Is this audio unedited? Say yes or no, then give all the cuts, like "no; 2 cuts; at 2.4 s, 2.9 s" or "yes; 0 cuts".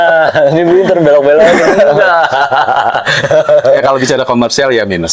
yes; 0 cuts